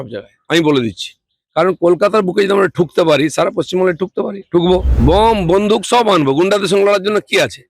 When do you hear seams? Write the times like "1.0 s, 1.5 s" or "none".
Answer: 4.9 s